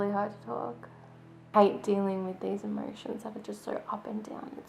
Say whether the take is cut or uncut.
cut